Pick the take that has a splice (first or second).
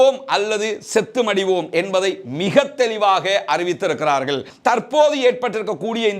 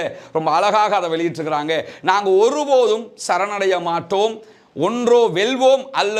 first